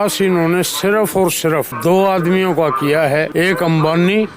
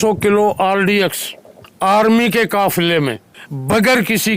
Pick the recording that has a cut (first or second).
first